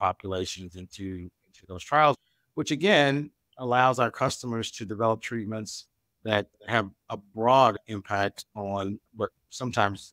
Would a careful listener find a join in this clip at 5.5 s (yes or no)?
no